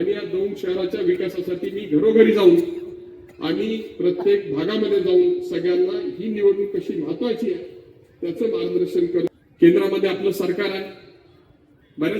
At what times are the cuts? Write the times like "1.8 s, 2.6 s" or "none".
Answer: 9.3 s